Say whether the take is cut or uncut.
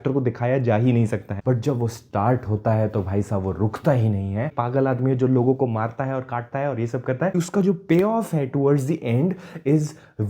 cut